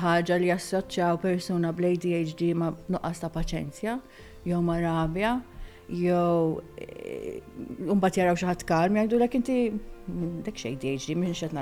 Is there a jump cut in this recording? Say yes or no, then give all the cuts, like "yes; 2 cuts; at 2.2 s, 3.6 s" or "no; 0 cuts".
no; 0 cuts